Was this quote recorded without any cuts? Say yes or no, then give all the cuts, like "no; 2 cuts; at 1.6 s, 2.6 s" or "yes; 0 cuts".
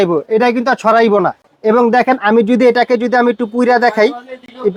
yes; 0 cuts